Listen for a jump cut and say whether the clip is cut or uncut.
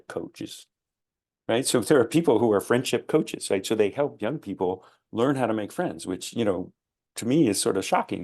uncut